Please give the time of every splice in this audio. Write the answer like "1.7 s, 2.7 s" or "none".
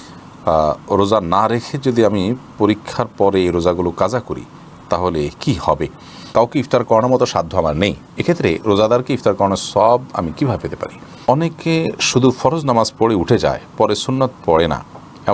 6.3 s, 11.2 s